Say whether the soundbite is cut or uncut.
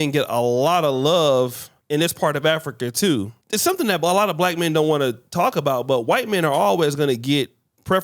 cut